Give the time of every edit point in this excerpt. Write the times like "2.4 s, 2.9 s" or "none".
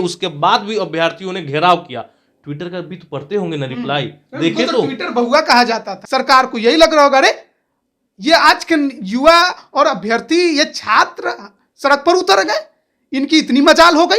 6.0 s